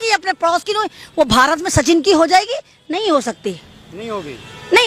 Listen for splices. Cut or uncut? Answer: uncut